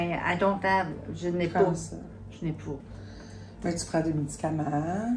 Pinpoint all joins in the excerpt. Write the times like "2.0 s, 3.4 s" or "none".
none